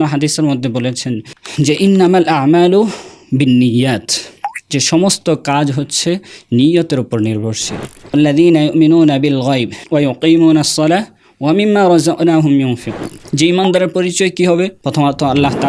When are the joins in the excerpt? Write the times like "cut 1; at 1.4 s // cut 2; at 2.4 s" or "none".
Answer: cut 1; at 8.1 s